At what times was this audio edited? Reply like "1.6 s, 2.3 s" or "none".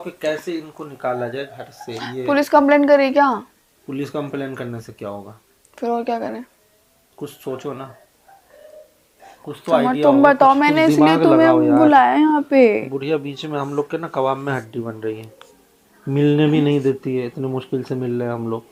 none